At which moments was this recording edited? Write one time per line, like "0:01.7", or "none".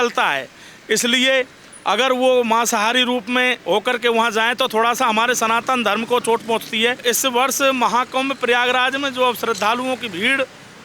0:07.0